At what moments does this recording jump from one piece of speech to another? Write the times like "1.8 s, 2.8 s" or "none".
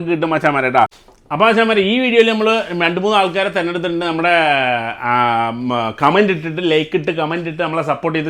none